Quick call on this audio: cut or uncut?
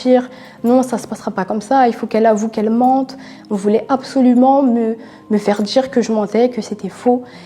uncut